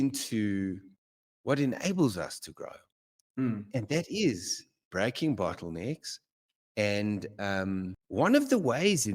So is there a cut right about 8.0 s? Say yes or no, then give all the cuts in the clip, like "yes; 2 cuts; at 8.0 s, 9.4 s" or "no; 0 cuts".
yes; 1 cut; at 8.0 s